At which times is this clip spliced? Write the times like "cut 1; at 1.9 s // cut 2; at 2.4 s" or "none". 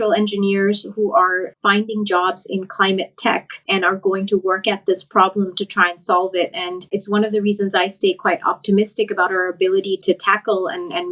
cut 1; at 3.5 s // cut 2; at 6.9 s